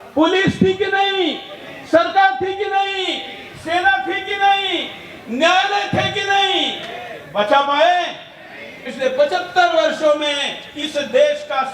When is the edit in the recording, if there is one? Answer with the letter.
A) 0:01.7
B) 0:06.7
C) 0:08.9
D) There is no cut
C